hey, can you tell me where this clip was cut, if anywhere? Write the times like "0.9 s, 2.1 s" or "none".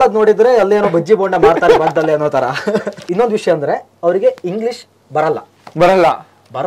3.0 s